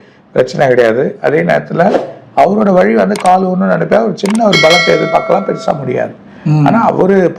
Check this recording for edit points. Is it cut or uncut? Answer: uncut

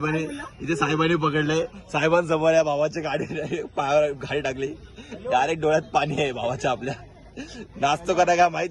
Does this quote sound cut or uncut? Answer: uncut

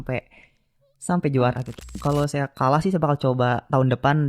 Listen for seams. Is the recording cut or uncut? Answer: cut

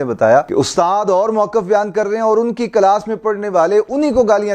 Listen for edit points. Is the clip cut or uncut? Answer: uncut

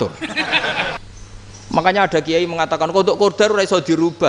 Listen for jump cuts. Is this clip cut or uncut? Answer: cut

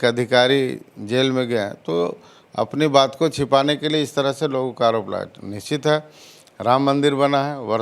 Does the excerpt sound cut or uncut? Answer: uncut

